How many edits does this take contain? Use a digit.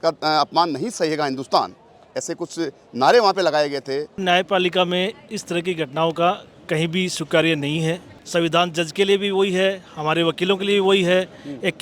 2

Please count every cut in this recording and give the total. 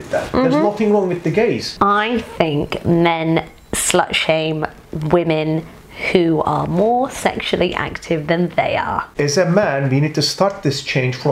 2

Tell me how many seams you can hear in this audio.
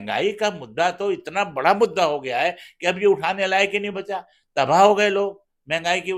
0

